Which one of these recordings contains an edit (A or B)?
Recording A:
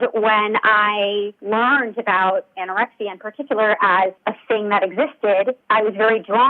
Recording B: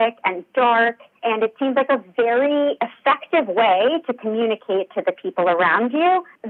A